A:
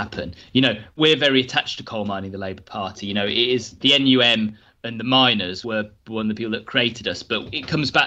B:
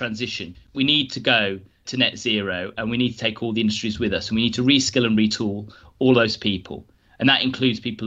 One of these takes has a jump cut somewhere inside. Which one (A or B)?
A